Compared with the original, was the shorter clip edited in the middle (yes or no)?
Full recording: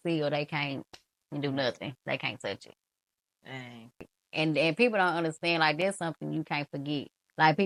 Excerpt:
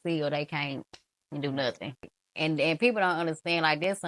yes